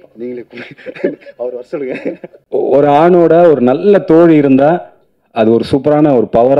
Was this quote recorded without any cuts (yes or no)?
no